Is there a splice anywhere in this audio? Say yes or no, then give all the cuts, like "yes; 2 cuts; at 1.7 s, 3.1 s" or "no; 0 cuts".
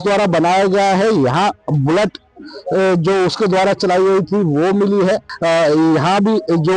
yes; 1 cut; at 5.3 s